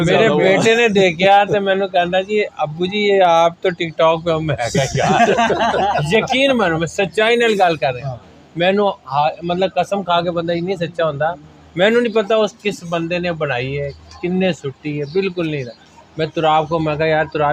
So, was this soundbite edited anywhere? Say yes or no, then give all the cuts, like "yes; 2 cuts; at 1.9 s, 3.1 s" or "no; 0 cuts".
no; 0 cuts